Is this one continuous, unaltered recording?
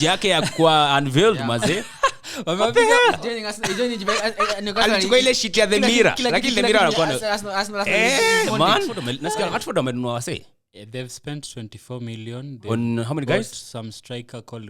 no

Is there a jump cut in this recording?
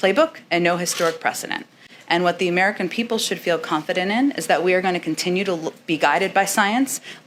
no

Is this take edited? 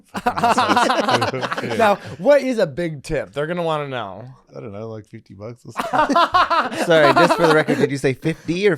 yes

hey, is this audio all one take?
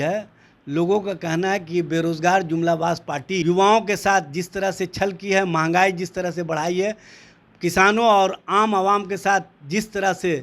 no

